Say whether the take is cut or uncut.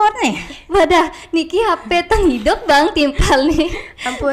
uncut